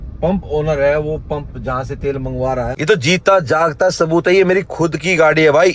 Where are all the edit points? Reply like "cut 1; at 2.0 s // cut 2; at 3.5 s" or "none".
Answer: cut 1; at 2.7 s